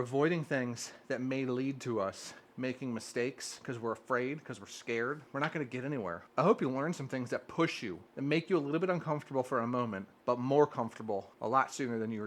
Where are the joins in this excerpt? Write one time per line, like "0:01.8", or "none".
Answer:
0:05.2
0:06.2
0:08.0
0:10.1
0:11.3